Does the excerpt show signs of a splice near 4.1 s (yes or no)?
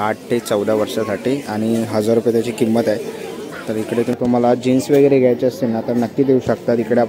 yes